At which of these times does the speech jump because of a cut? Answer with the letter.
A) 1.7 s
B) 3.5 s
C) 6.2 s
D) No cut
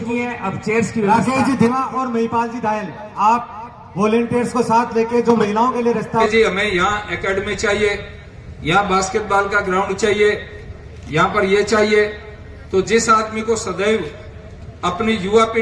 C